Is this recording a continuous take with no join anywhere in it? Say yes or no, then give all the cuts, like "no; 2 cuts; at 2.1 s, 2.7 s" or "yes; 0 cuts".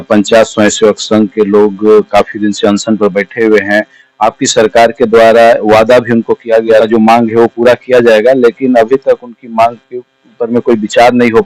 no; 1 cut; at 6.8 s